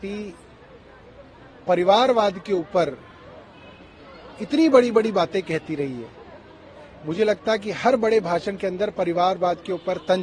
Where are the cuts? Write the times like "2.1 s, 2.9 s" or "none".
none

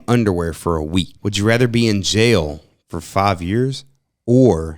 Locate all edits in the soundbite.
1.1 s

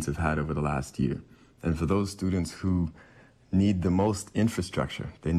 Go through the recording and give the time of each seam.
none

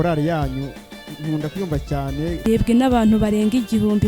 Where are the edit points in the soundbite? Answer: 2.4 s

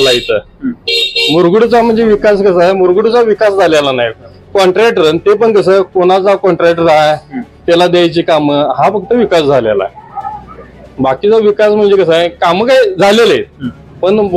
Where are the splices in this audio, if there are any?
none

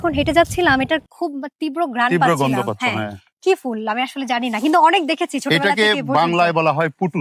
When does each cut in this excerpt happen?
none

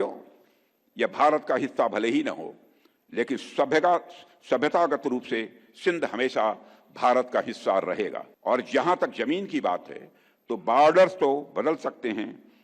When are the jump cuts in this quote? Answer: 8.3 s

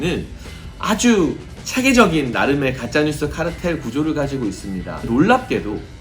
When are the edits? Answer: 5.1 s

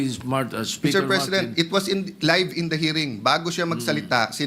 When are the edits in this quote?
none

